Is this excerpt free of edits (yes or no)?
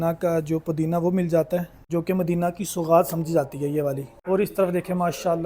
no